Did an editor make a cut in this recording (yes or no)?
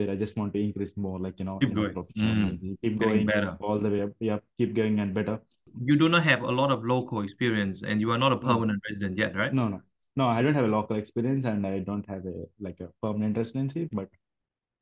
yes